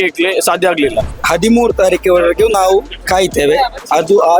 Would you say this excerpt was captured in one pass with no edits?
no; 1 cut; at 1.2 s

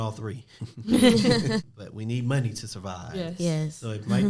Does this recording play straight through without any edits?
no; 1 cut; at 1.6 s

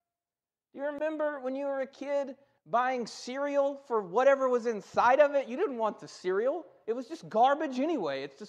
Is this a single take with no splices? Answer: no; 1 cut; at 3.2 s

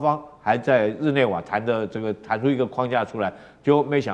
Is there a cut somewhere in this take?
no; 0 cuts

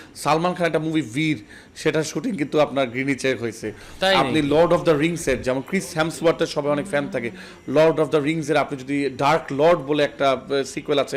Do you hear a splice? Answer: no; 0 cuts

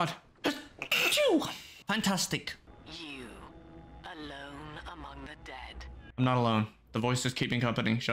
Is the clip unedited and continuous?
no; 2 cuts; at 2.6 s, 6.1 s

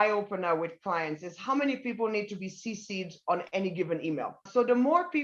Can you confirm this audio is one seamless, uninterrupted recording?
yes; 0 cuts

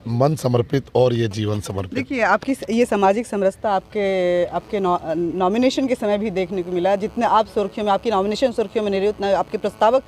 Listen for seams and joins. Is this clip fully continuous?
yes; 0 cuts

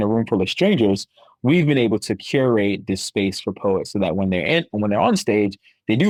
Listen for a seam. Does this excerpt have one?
no; 0 cuts

